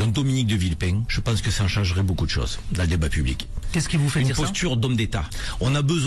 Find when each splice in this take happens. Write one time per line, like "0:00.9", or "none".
none